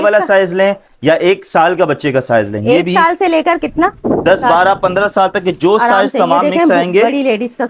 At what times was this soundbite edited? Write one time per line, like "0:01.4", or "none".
none